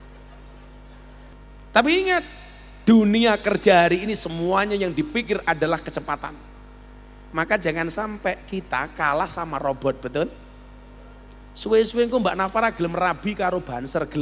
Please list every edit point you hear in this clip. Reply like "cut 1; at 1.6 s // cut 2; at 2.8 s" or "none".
cut 1; at 1.3 s